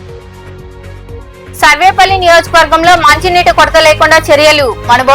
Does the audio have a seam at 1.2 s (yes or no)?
yes